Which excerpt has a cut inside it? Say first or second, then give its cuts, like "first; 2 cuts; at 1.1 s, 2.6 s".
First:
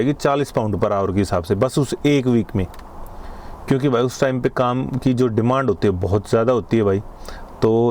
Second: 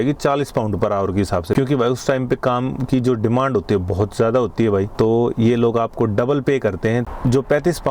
second; 3 cuts; at 1.6 s, 4.9 s, 7.1 s